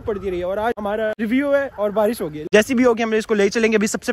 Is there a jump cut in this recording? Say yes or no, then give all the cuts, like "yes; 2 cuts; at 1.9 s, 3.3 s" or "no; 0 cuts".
yes; 2 cuts; at 1.0 s, 2.3 s